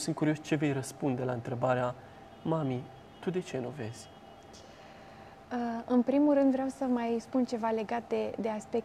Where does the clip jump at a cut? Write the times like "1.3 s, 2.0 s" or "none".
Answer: none